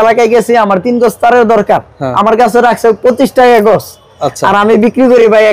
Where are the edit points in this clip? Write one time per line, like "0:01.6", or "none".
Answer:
none